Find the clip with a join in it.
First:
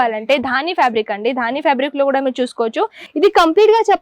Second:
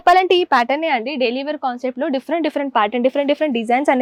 first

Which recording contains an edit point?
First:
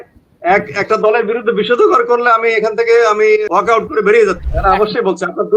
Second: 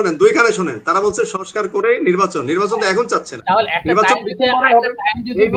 first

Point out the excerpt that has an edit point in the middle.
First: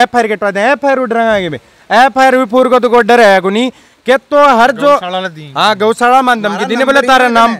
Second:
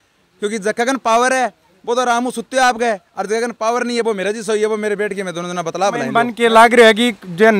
second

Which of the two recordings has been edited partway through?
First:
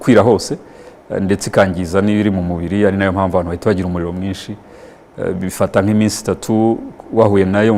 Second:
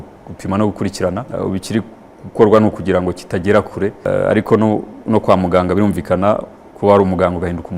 second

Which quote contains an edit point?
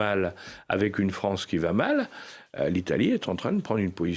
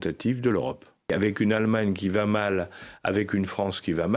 second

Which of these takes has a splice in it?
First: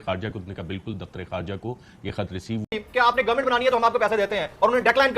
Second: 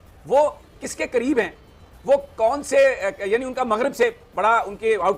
first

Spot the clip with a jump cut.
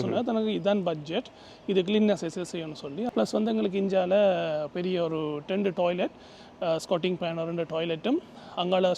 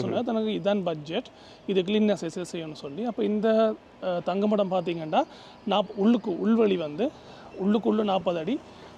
first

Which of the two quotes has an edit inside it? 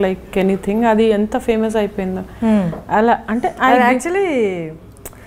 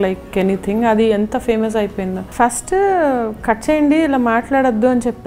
second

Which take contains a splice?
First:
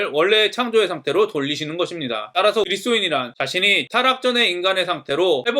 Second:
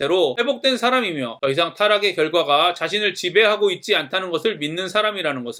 first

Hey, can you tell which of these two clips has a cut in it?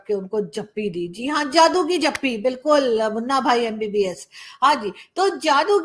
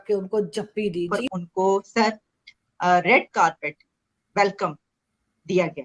second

